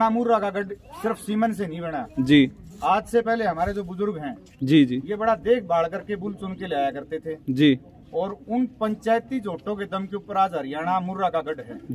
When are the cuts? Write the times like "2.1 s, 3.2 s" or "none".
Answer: none

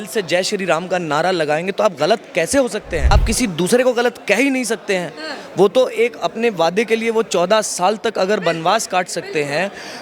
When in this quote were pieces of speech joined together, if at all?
3.1 s

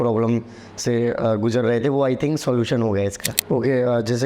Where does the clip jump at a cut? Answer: 3.3 s

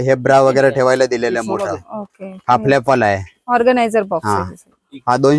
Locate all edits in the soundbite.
none

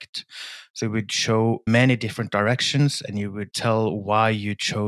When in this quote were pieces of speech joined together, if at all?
1.7 s

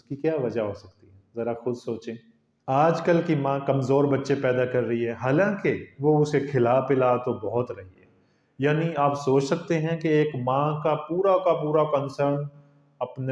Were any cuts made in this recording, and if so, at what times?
2.5 s

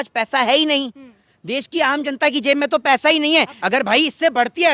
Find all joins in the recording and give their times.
3.6 s

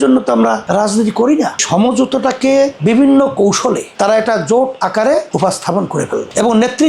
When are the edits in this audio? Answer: 1.6 s, 3.9 s

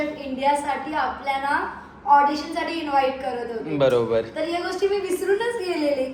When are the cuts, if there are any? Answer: none

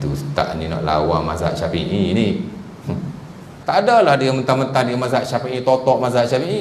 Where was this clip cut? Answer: 3.5 s

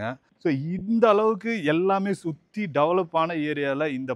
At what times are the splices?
none

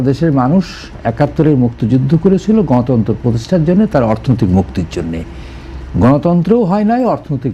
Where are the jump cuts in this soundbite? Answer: none

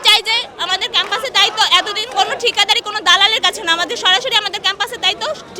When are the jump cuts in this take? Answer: none

